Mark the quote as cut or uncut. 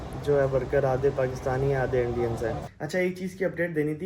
cut